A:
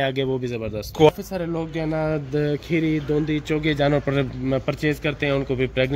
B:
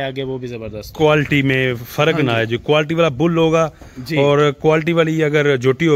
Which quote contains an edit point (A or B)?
A